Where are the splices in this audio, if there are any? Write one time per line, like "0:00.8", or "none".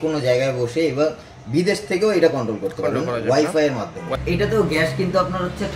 0:04.2